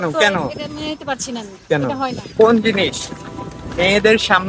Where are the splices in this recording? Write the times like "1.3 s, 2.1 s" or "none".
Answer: 2.4 s